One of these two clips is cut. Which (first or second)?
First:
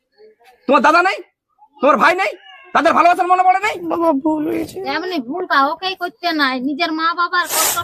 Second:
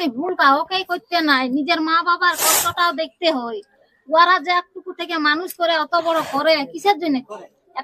first